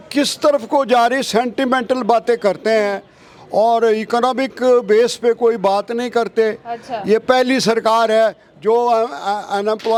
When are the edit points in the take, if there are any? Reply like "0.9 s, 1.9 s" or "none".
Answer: none